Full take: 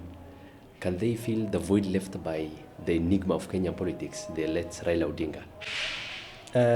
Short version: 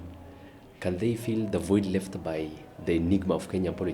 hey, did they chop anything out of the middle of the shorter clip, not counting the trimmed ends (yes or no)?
no